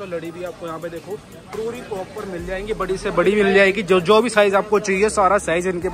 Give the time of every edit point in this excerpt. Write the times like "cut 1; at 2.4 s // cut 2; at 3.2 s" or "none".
none